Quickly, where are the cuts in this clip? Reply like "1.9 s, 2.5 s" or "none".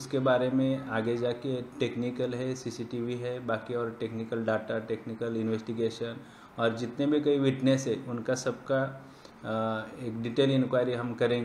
none